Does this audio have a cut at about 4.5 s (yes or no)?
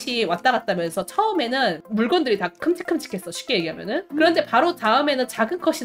no